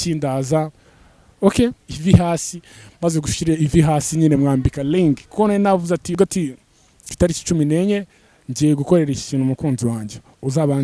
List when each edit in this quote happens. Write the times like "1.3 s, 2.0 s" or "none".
1.9 s, 6.2 s